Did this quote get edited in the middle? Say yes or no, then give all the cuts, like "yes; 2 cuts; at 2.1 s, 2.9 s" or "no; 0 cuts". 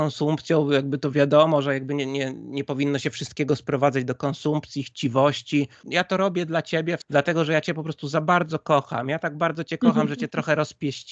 yes; 2 cuts; at 5.8 s, 7.0 s